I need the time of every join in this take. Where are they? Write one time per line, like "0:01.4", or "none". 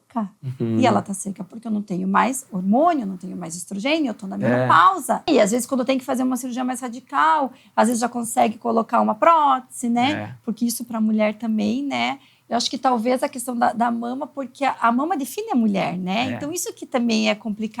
0:05.3